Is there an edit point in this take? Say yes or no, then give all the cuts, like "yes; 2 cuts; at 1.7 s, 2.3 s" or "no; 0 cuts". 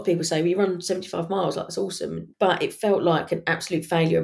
yes; 1 cut; at 2.2 s